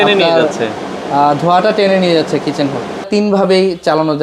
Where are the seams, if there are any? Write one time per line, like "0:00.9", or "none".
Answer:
0:03.1